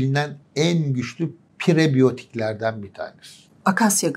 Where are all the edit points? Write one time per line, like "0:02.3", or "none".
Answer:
none